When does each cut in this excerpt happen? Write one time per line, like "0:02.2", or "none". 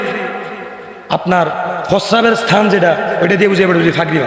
none

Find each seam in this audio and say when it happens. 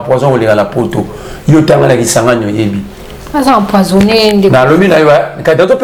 none

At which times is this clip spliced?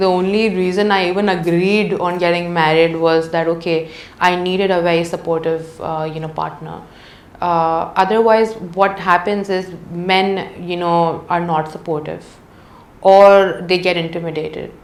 none

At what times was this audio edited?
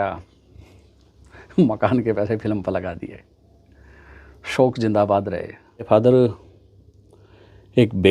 0:05.9

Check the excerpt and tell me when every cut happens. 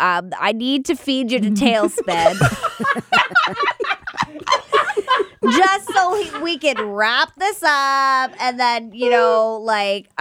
none

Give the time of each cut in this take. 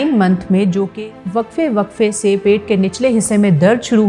0:01.0

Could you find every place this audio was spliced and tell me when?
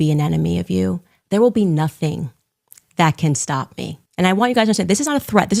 0:01.1
0:04.0

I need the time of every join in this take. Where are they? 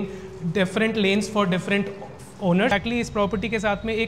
0:02.7

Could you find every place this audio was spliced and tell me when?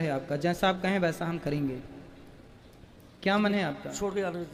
none

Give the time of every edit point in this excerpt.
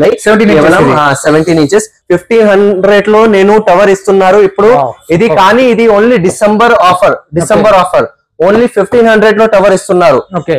0:02.0

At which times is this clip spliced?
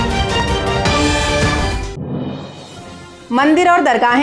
0:03.1

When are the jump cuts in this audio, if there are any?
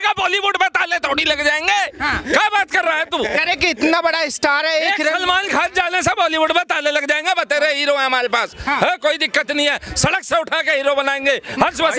none

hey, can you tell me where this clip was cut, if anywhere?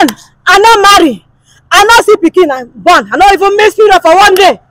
none

